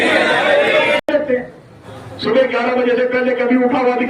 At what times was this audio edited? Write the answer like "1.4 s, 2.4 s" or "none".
1.0 s